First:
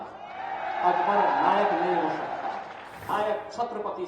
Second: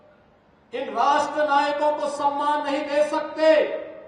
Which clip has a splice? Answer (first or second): first